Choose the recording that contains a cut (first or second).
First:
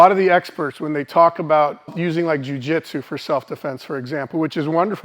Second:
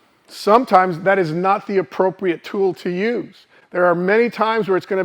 first